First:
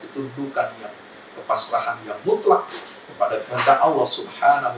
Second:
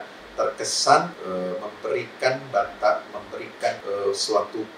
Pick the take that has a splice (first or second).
second